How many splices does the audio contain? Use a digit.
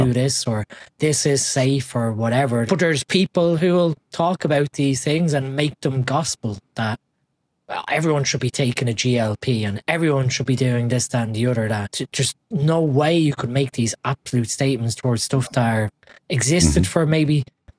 2